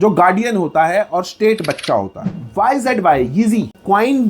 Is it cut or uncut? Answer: cut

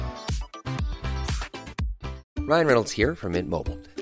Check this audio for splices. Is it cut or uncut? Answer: cut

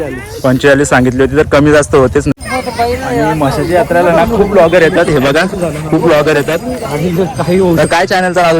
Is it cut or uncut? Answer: cut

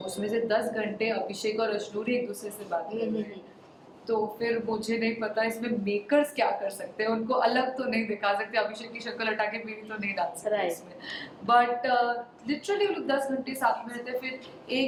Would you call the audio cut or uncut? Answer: uncut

